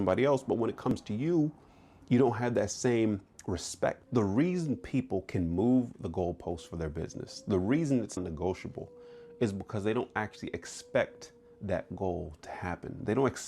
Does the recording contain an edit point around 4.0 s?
yes; 2 cuts; at 4.0 s, 8.2 s

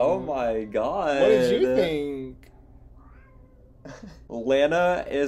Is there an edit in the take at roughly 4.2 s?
yes; 1 cut; at 4.2 s

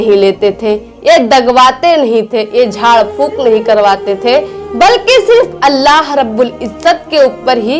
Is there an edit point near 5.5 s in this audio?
no; 0 cuts

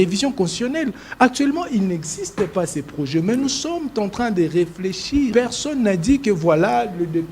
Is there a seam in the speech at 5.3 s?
yes; 1 cut; at 5.3 s

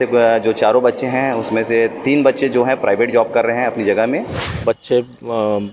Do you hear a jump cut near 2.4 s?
no; 1 cut; at 4.4 s

